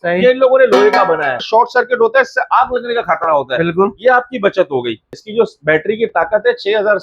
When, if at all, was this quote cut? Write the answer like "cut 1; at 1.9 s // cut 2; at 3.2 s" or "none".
cut 1; at 1.4 s // cut 2; at 5.1 s